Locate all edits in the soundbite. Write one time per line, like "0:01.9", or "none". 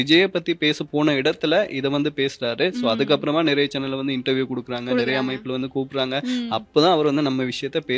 none